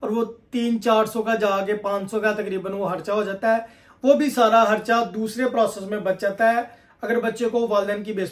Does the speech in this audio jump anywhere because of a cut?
no; 0 cuts

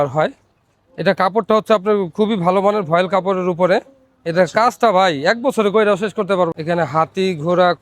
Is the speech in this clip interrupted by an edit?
yes; 1 cut; at 6.5 s

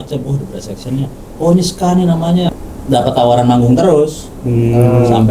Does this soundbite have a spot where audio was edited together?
yes; 1 cut; at 2.5 s

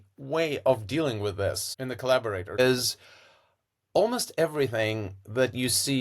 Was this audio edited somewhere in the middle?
yes; 2 cuts; at 1.7 s, 2.6 s

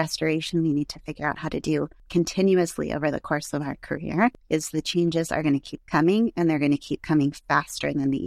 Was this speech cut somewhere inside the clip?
yes; 2 cuts; at 2.0 s, 4.4 s

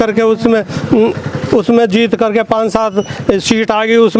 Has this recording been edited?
no; 0 cuts

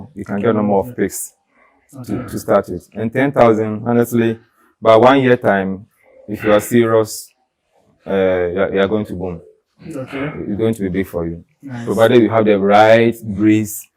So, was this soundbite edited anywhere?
no; 0 cuts

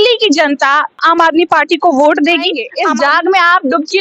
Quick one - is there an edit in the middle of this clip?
yes; 2 cuts; at 1.0 s, 2.7 s

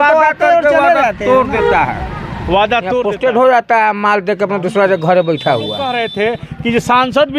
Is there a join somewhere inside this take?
yes; 2 cuts; at 3.0 s, 5.9 s

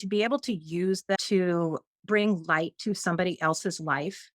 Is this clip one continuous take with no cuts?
no; 1 cut; at 1.2 s

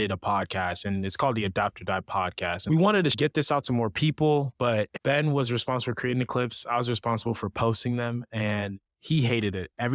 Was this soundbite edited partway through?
yes; 3 cuts; at 2.6 s, 3.1 s, 4.9 s

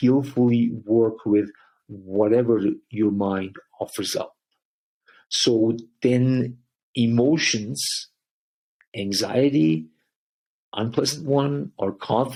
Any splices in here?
no; 0 cuts

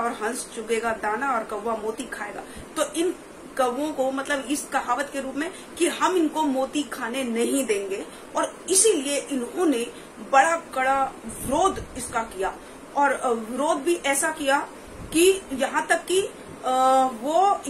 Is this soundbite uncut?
yes; 0 cuts

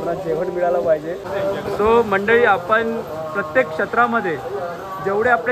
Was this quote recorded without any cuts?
no; 1 cut; at 1.2 s

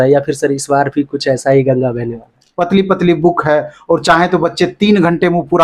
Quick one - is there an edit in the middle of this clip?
yes; 1 cut; at 2.4 s

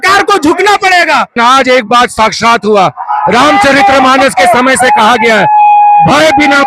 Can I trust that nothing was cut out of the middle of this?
no; 1 cut; at 1.3 s

